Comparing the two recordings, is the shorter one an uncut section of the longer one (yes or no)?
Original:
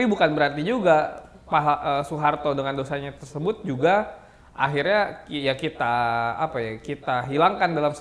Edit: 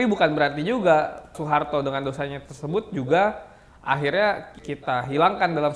no